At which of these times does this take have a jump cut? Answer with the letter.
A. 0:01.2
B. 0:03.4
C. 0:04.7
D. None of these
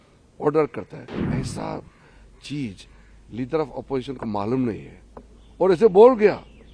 A